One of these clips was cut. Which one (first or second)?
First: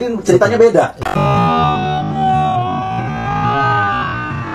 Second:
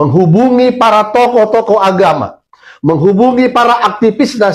first